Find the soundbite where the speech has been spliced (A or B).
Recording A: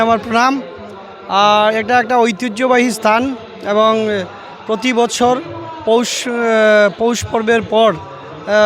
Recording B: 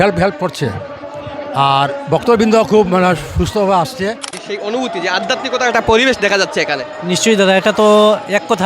B